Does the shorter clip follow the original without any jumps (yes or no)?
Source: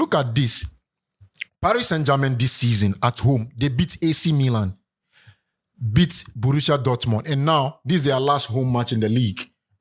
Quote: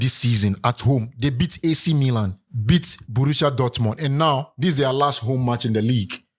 no